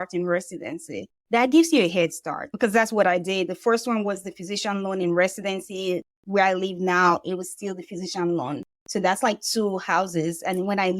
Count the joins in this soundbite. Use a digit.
1